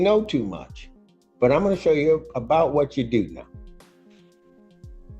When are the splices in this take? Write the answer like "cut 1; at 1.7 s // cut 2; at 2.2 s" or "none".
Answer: cut 1; at 3.5 s

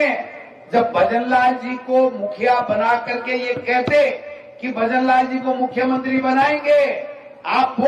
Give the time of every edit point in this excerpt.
none

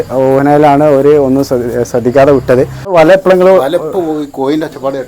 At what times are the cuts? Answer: cut 1; at 2.9 s

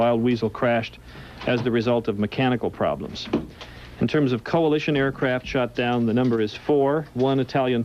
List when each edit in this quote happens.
cut 1; at 6.3 s

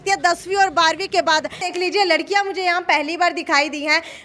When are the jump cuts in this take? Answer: cut 1; at 1.7 s

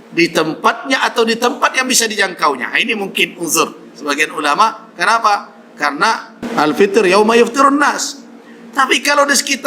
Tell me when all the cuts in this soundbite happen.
cut 1; at 6.4 s

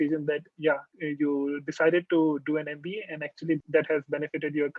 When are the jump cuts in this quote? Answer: cut 1; at 0.9 s // cut 2; at 3.6 s

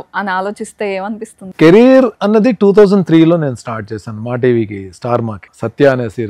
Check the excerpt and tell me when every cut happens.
cut 1; at 1.4 s

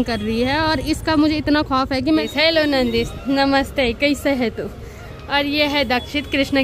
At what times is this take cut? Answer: cut 1; at 2.2 s

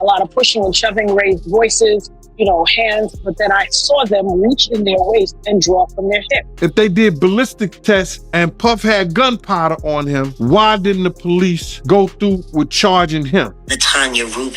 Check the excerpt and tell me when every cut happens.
cut 1; at 6.4 s // cut 2; at 8.2 s // cut 3; at 10.3 s // cut 4; at 11.7 s // cut 5; at 13.6 s

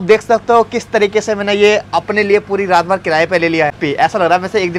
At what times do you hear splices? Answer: cut 1; at 3.8 s

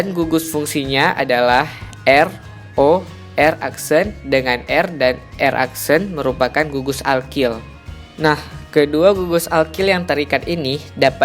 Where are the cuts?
none

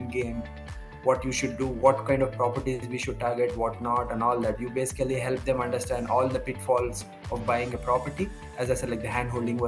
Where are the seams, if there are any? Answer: cut 1; at 8.5 s

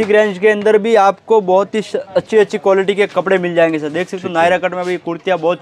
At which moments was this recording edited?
none

